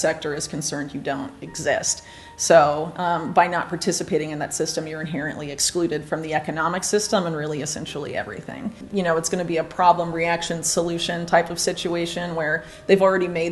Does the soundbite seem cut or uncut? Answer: cut